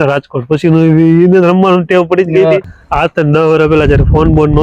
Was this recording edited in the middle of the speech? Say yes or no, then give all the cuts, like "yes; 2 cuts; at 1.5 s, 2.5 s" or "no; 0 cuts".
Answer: yes; 1 cut; at 2.8 s